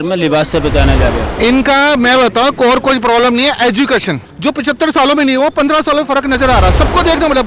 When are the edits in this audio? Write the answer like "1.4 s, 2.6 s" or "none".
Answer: 1.3 s, 4.3 s